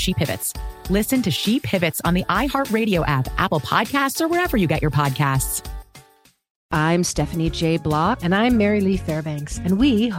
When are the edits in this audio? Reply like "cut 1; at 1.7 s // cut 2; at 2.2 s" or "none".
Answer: cut 1; at 6.6 s